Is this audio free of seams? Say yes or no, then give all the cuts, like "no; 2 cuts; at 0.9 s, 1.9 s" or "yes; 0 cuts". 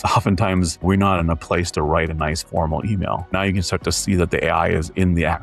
yes; 0 cuts